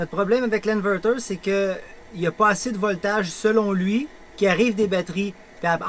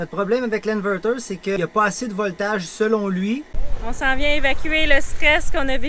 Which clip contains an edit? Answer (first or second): second